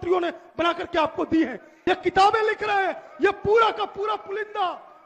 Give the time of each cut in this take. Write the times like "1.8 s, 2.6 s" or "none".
1.7 s